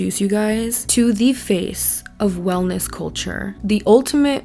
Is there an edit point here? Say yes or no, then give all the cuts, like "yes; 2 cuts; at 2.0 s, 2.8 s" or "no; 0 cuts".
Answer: no; 0 cuts